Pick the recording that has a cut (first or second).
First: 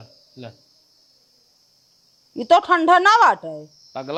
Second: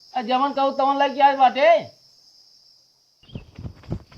second